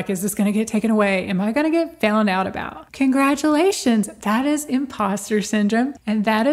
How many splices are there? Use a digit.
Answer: 0